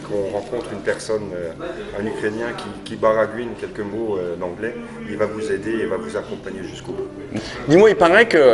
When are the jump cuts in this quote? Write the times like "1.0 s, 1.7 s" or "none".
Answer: 7.3 s